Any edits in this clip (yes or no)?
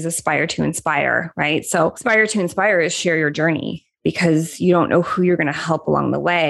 yes